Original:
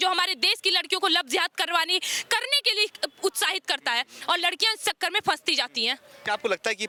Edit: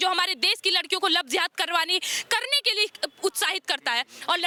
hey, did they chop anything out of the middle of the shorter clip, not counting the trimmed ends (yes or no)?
no